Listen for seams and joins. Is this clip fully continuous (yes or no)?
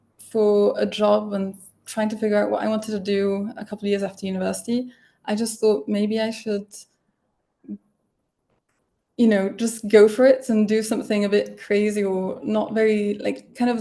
yes